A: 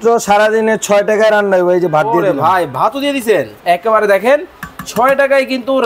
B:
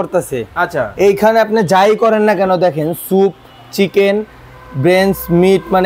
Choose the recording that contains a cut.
A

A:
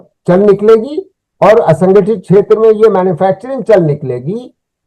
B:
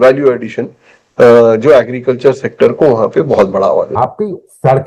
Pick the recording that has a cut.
B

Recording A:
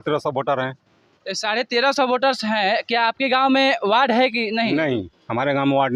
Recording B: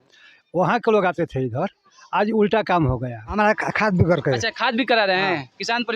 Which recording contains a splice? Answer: B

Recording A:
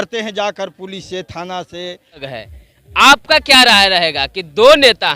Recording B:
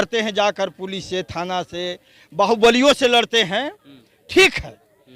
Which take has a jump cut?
A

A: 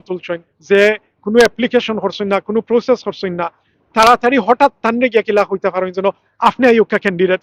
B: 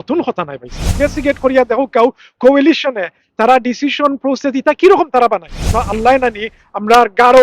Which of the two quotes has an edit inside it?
B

